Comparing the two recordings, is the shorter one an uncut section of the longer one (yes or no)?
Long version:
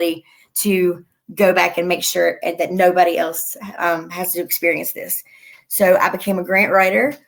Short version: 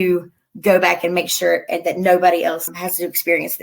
no